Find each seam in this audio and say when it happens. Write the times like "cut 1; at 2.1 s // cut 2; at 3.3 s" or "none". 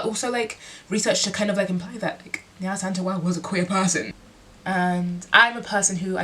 cut 1; at 4.2 s